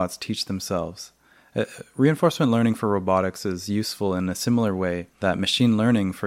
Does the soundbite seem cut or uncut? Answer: uncut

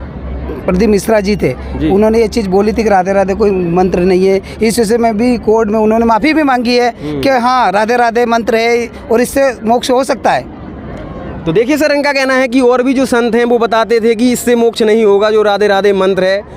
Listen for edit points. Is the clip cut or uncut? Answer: uncut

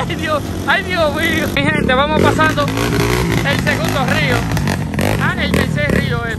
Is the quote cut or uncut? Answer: cut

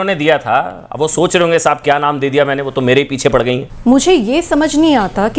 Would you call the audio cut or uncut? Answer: cut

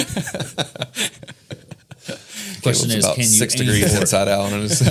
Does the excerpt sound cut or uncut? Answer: uncut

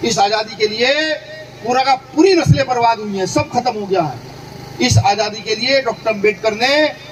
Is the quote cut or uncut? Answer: uncut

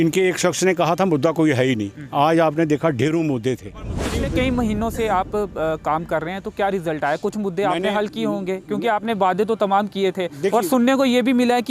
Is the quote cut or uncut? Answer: cut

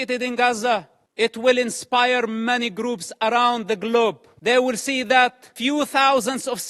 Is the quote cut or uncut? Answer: cut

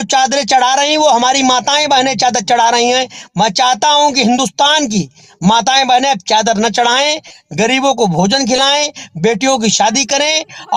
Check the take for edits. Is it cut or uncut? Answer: uncut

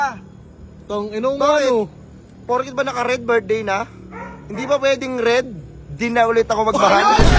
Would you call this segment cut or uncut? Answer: uncut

